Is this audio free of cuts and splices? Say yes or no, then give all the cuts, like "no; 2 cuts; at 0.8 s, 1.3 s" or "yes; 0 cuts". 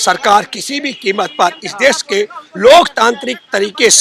yes; 0 cuts